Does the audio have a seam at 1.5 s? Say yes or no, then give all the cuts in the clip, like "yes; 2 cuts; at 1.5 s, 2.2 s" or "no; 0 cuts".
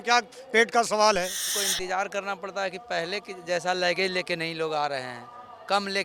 yes; 1 cut; at 1.5 s